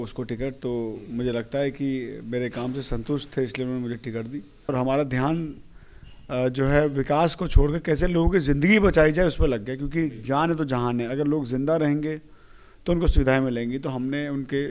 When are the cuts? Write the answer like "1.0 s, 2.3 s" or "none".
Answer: 4.7 s